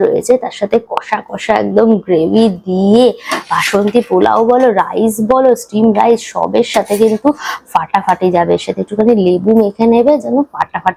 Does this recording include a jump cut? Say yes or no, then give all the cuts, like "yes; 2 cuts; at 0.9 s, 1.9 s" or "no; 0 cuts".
no; 0 cuts